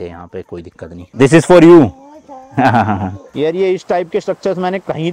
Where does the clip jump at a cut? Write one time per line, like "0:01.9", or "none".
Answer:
0:01.0
0:03.3